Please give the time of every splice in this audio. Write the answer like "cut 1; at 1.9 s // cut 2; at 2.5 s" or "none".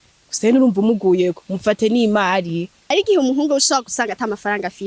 cut 1; at 2.8 s